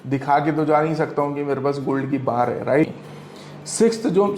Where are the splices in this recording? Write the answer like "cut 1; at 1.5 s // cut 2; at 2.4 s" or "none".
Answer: cut 1; at 2.9 s

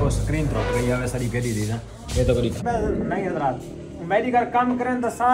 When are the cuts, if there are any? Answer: cut 1; at 2.6 s

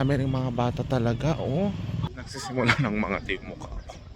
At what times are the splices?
cut 1; at 2.0 s

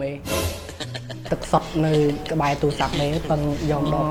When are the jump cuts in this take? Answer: none

